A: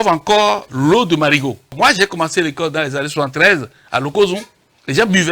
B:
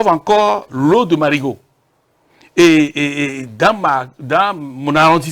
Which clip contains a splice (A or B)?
A